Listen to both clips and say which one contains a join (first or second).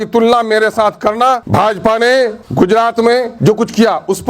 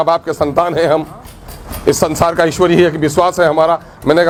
first